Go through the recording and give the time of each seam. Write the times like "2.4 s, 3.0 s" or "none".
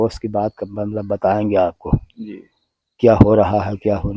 none